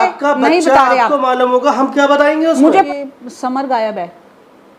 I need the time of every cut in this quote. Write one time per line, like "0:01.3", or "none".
0:02.7